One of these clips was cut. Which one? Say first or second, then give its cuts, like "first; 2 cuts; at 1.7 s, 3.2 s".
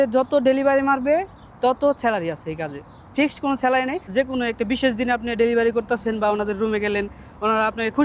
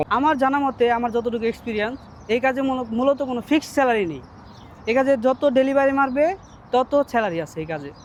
first; 1 cut; at 4.1 s